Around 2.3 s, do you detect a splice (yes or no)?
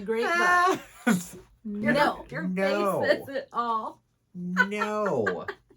yes